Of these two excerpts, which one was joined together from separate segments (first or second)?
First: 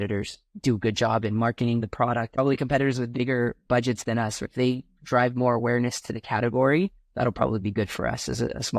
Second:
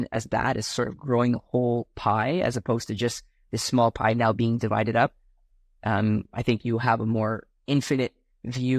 first